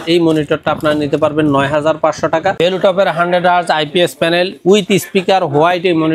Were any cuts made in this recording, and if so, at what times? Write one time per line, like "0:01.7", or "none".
0:02.6

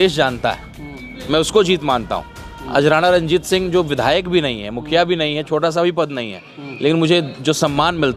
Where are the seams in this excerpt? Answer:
none

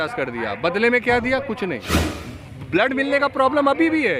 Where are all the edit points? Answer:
0:01.9

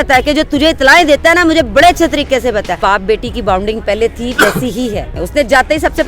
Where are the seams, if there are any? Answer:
0:02.8
0:05.1

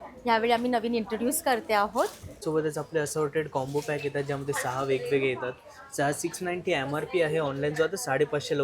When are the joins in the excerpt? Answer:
0:02.4

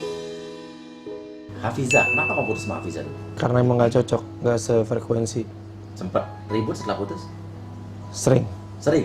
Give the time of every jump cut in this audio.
0:01.4
0:03.4

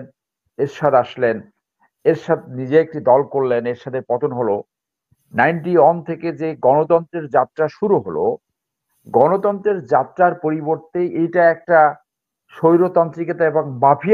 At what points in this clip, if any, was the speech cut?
none

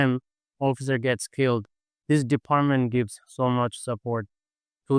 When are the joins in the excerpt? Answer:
none

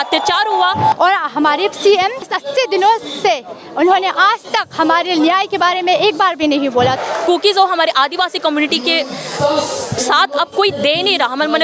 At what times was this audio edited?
0:00.9
0:02.3
0:07.0

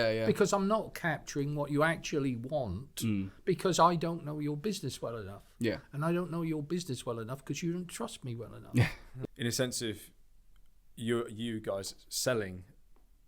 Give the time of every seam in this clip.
0:09.1

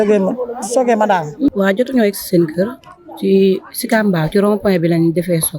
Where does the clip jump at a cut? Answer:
0:01.5

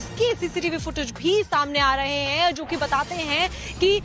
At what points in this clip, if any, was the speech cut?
none

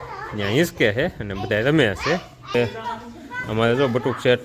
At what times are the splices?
0:02.5

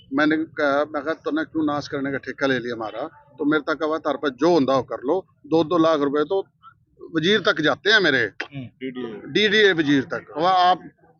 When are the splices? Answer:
0:10.2

